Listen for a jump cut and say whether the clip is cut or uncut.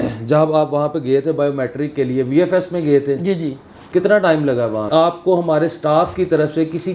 cut